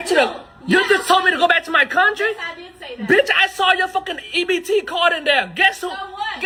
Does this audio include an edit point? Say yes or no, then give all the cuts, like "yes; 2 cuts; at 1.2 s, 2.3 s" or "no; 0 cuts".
no; 0 cuts